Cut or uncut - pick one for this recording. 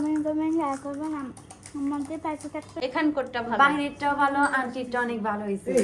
cut